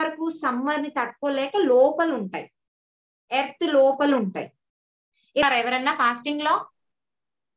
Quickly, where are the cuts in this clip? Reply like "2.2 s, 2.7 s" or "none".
5.4 s